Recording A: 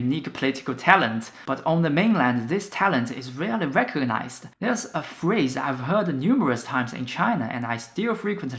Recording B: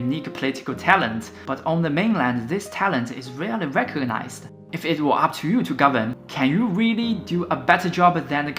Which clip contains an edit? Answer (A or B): B